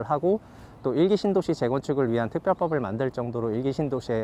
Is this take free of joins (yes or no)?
yes